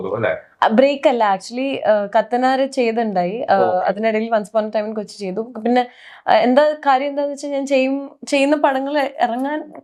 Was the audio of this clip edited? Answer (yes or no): no